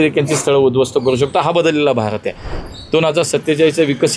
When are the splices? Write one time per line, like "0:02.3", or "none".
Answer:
0:02.6